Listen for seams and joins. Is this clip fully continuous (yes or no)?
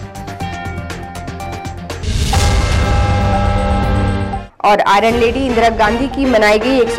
yes